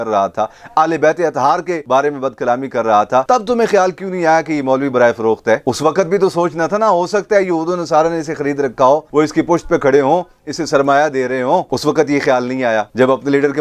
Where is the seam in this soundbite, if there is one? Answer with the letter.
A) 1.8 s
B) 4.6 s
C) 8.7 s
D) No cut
A